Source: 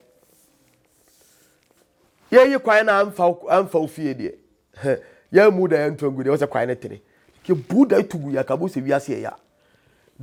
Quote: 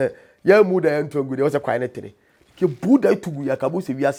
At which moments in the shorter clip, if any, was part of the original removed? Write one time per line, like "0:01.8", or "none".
none